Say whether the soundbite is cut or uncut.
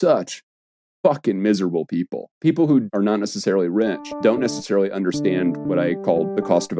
cut